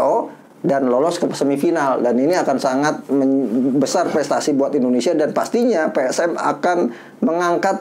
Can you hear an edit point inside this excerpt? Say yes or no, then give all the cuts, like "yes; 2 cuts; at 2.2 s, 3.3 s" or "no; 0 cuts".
no; 0 cuts